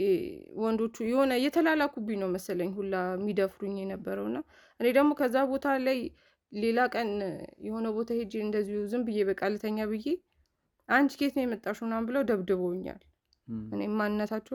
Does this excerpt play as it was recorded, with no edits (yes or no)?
yes